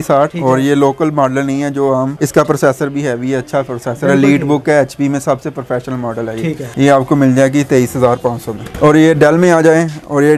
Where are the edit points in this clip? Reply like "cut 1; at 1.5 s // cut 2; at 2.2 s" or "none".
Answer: none